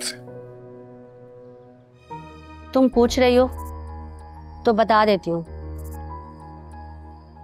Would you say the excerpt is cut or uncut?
cut